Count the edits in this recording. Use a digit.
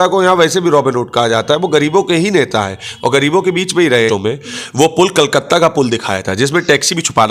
1